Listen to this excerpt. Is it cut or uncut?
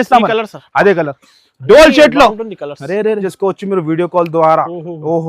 cut